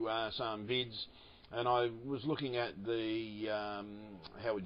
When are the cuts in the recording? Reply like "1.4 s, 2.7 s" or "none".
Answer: 1.7 s